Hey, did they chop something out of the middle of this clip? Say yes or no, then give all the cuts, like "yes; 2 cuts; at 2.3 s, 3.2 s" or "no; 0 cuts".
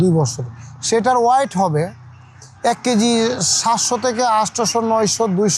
no; 0 cuts